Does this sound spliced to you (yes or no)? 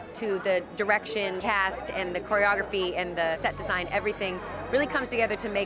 yes